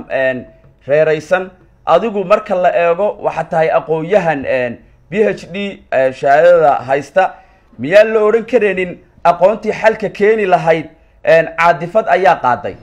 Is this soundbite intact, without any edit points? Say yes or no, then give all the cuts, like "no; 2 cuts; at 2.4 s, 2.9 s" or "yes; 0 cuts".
yes; 0 cuts